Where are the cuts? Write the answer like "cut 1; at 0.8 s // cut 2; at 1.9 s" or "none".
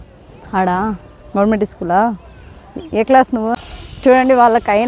cut 1; at 3.5 s